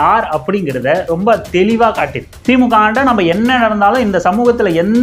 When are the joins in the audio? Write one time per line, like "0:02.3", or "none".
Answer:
0:02.3